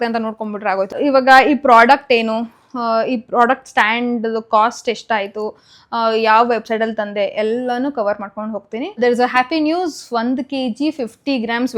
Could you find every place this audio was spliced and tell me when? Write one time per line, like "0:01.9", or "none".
0:00.9
0:08.9